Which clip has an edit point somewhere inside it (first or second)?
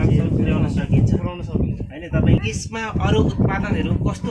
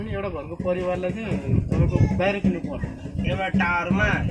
first